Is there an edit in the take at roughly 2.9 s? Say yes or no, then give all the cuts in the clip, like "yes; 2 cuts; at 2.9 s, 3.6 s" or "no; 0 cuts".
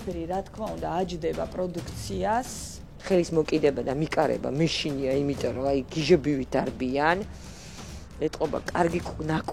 yes; 1 cut; at 2.9 s